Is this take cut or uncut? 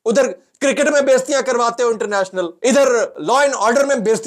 cut